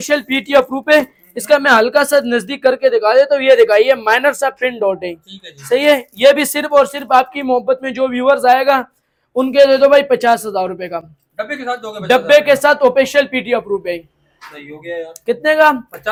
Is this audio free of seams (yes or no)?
yes